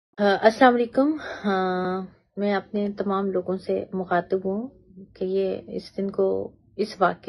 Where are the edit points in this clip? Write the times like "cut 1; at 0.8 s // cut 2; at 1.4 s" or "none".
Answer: cut 1; at 0.9 s

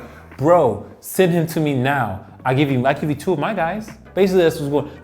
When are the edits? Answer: cut 1; at 4.0 s

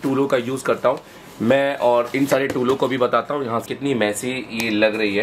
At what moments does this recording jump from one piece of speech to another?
cut 1; at 3.6 s

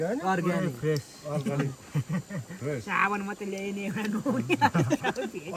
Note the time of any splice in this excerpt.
none

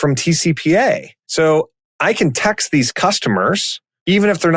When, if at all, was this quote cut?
cut 1; at 1.2 s

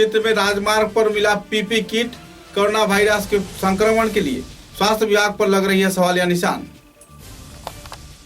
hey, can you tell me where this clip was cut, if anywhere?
none

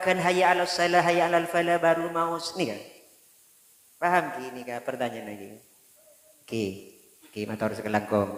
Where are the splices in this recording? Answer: none

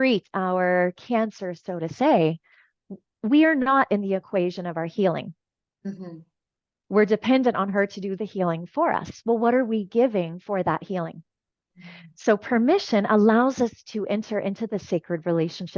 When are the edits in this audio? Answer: none

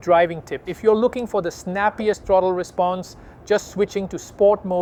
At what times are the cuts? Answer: none

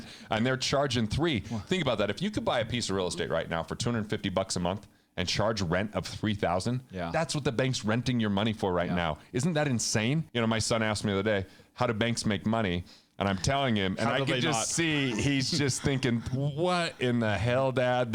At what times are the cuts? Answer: cut 1; at 10.3 s

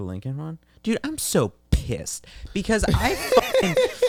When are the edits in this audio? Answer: none

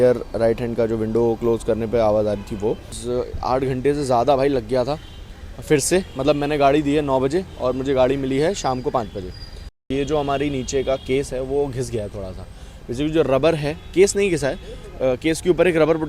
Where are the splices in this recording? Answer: cut 1; at 3.0 s // cut 2; at 9.8 s

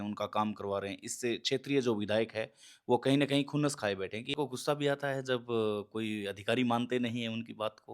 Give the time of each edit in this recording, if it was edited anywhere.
cut 1; at 4.3 s

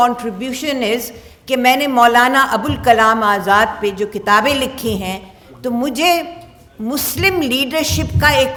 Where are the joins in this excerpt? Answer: none

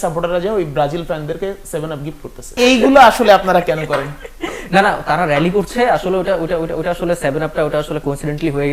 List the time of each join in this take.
cut 1; at 2.5 s

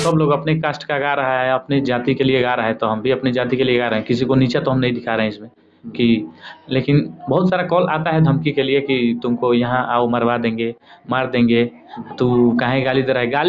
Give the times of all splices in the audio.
none

